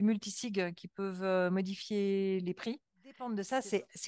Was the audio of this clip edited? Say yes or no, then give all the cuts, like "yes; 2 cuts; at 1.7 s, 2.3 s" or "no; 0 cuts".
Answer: yes; 1 cut; at 3.2 s